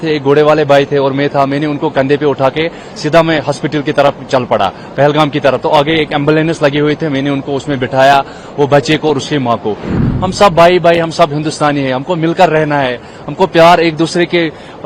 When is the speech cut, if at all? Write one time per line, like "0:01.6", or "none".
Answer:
0:09.9